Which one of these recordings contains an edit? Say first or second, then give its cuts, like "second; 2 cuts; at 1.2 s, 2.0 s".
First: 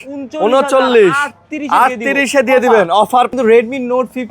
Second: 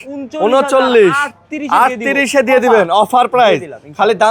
first; 1 cut; at 3.3 s